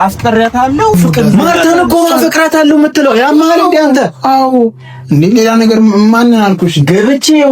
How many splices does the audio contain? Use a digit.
1